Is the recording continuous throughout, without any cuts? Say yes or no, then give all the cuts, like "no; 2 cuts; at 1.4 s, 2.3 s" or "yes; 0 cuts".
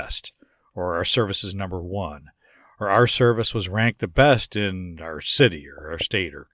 yes; 0 cuts